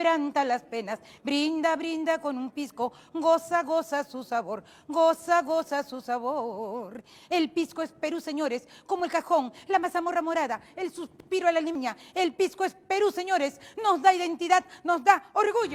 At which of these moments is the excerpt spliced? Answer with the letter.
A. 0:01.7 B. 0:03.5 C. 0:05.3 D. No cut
D